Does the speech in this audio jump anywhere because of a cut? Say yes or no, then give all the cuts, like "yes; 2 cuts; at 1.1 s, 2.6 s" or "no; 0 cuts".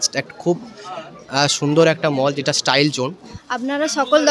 yes; 1 cut; at 3.3 s